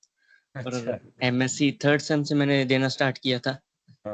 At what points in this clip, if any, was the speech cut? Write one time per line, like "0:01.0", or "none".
none